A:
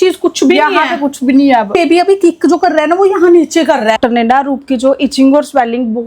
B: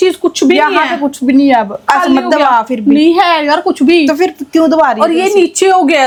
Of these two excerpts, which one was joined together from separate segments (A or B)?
A